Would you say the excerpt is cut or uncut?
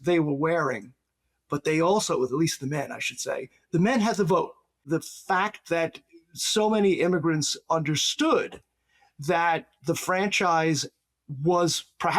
cut